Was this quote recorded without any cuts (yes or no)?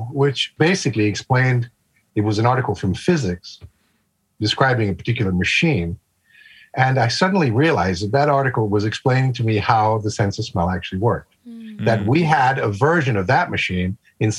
yes